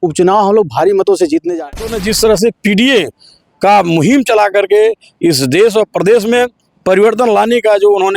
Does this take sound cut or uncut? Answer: cut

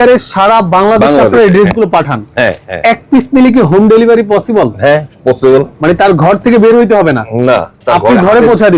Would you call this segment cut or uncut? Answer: uncut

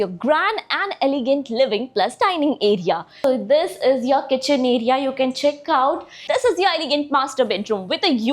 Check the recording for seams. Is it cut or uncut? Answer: cut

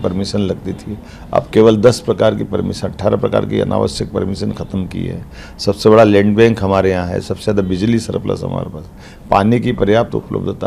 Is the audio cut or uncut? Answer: uncut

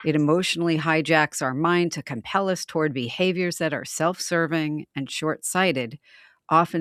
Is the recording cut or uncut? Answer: uncut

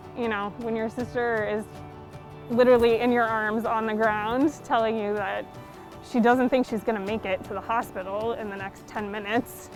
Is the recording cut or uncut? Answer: uncut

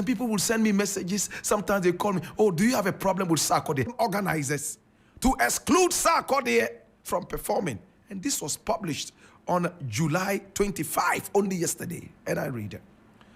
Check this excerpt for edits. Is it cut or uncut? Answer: cut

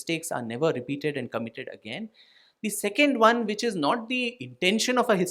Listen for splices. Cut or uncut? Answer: uncut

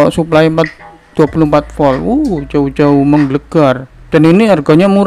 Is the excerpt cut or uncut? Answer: cut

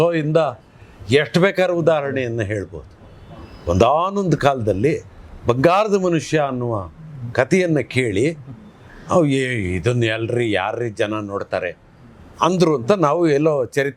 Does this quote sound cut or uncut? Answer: uncut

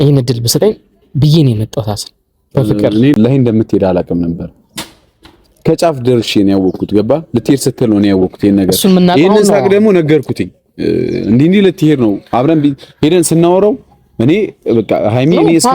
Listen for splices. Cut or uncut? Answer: cut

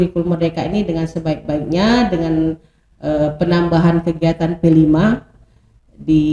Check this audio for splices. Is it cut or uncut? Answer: uncut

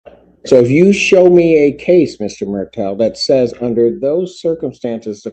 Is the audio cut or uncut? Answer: uncut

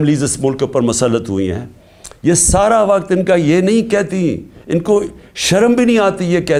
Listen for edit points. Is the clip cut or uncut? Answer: uncut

